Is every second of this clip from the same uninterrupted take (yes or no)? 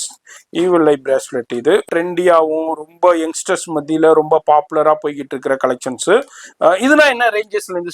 no